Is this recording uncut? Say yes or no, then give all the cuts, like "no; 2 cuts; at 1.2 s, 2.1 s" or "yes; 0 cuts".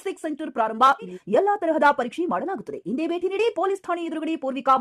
no; 1 cut; at 1.2 s